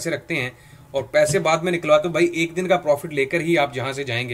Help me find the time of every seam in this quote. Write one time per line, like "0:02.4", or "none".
none